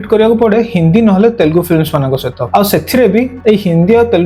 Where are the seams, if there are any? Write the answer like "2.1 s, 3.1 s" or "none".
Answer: 2.4 s, 3.3 s